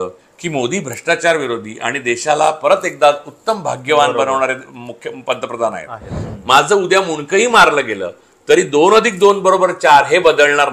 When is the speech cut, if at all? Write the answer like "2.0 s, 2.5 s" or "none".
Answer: 6.1 s